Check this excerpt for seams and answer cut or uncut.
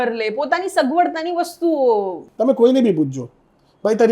cut